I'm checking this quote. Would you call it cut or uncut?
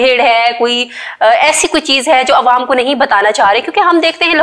uncut